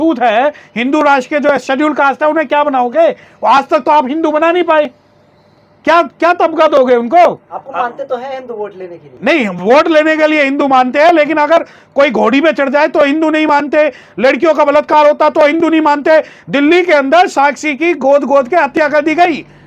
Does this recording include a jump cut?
no; 0 cuts

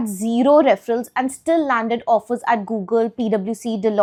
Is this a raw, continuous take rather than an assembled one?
yes; 0 cuts

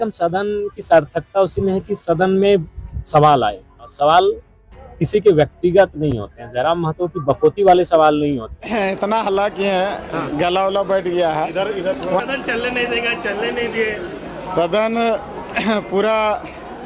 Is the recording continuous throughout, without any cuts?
no; 2 cuts; at 3.8 s, 8.6 s

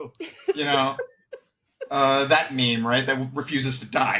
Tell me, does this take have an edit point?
no; 0 cuts

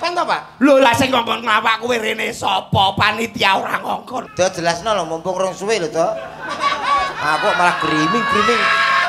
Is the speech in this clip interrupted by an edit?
yes; 1 cut; at 4.3 s

